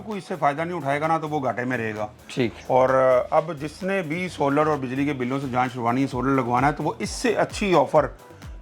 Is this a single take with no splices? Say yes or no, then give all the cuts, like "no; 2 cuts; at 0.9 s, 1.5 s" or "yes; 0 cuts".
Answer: yes; 0 cuts